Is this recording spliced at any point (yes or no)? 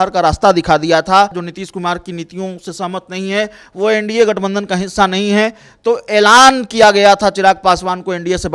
yes